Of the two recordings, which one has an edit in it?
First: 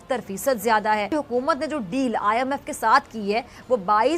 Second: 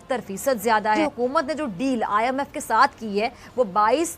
second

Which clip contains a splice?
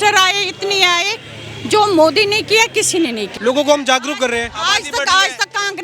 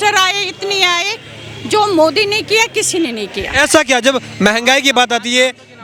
first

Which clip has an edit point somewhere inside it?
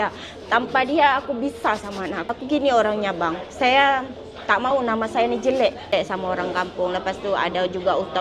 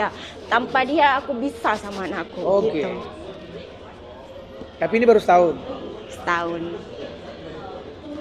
first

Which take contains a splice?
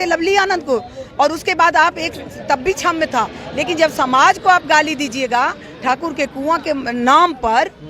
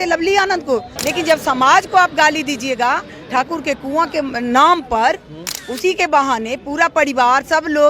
second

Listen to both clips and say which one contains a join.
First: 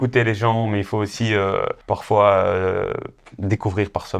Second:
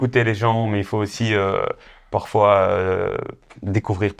first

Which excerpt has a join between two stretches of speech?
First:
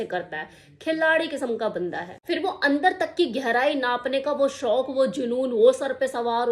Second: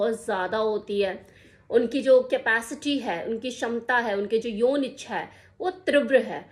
first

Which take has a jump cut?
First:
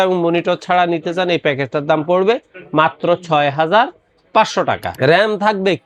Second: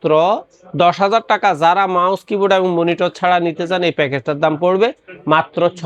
first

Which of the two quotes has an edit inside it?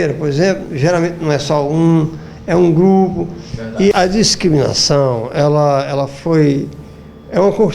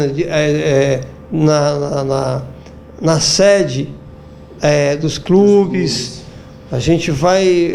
first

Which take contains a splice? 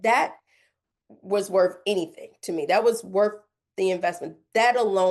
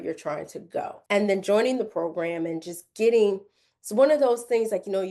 second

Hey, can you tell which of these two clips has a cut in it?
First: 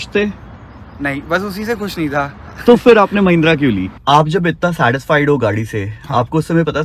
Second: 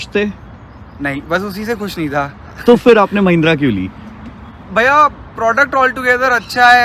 first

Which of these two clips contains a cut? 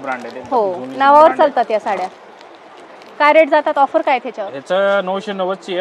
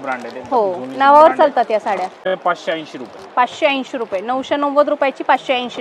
second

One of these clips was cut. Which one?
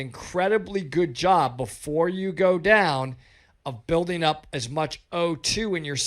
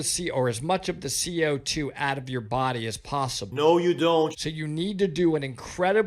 second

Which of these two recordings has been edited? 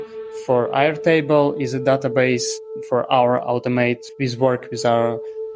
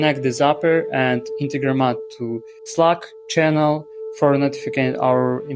first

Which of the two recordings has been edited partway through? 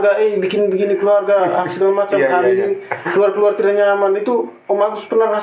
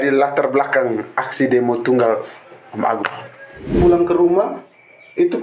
second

